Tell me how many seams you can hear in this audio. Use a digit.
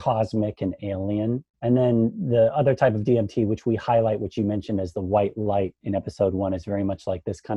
1